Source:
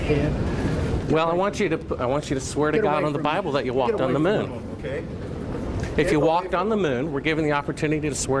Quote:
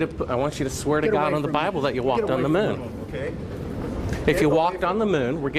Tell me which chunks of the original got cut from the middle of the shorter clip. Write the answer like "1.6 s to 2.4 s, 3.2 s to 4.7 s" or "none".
none